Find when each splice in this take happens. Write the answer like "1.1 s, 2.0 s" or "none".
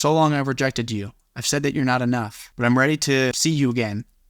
2.4 s, 3.4 s